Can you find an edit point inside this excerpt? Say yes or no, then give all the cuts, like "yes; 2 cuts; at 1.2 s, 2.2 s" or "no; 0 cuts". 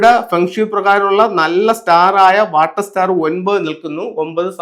no; 0 cuts